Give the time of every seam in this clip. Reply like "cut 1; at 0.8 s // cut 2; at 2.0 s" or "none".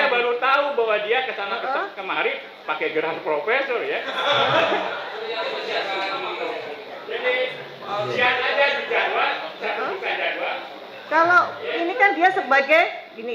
none